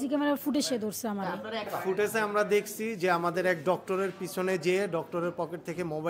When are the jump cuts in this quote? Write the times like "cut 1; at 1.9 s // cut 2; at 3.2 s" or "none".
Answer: cut 1; at 1.7 s